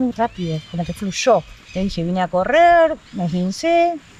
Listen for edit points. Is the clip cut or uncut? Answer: uncut